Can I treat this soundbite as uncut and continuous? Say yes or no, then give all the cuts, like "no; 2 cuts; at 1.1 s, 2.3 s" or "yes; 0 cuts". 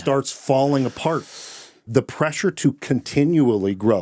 no; 1 cut; at 1.9 s